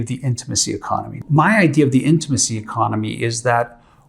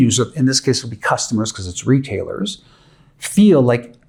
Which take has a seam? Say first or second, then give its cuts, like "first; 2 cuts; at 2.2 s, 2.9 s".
first; 1 cut; at 1.1 s